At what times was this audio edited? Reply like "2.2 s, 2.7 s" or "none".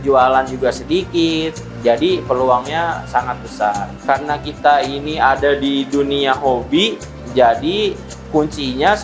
3.9 s